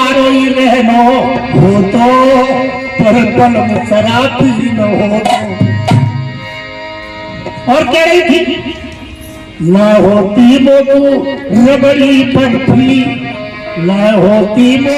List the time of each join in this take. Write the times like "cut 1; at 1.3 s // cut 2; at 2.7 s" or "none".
none